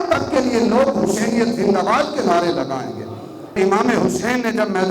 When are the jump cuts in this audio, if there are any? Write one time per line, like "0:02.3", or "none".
0:03.6